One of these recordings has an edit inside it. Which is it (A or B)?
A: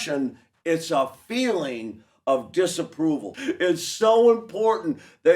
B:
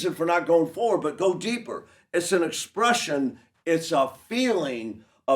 A